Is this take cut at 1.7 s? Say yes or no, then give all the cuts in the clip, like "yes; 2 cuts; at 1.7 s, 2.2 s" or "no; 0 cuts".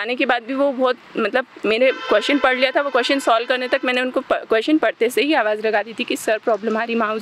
no; 0 cuts